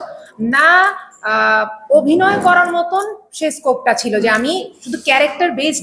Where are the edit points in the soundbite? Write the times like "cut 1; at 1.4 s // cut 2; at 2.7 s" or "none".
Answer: none